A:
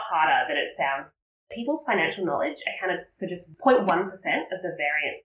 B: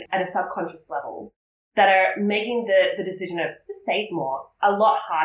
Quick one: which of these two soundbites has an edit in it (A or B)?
A